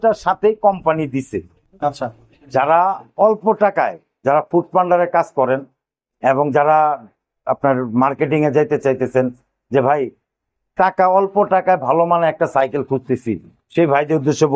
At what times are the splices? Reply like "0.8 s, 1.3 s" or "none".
1.6 s